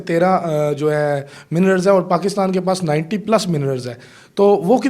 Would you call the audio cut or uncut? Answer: uncut